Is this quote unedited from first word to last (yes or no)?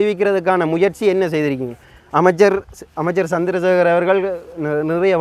yes